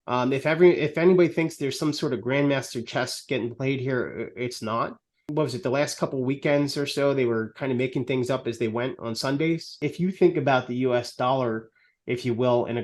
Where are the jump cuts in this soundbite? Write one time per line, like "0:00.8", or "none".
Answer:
0:05.2
0:09.8